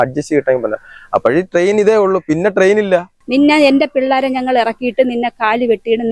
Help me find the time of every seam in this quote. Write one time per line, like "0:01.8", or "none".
0:03.2

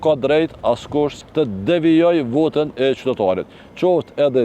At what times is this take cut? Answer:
0:01.2

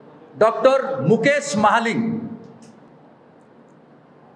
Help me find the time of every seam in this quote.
0:02.9

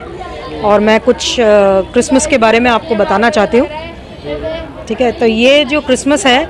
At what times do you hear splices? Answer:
none

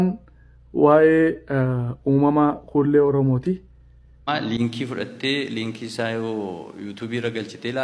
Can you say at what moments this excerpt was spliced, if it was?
0:04.2

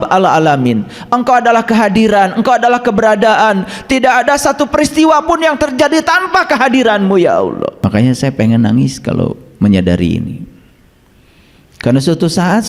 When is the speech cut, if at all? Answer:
0:07.7

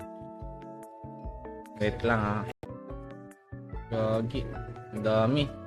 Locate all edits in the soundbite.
0:02.7

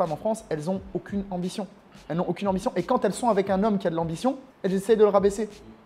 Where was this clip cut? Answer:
0:04.5

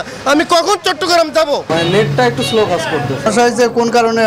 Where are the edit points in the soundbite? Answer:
0:01.7

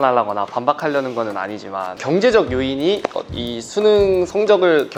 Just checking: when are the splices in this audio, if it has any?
none

